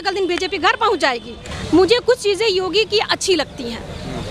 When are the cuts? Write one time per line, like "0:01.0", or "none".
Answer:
none